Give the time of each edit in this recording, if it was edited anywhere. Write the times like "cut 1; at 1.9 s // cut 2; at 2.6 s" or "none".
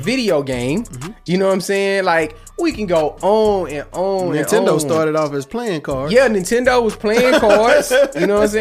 none